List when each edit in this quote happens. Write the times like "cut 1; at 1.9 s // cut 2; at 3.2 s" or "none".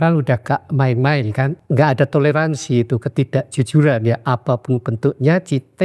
cut 1; at 1.6 s